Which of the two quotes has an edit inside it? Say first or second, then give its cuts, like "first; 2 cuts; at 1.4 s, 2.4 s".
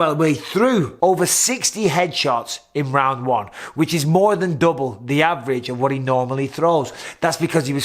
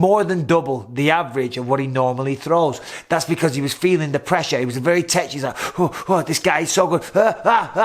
first; 1 cut; at 0.9 s